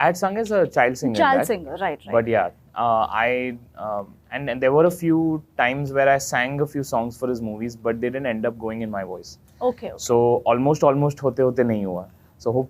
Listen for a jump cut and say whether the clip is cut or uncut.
uncut